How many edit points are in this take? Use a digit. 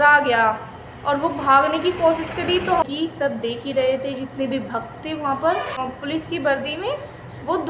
2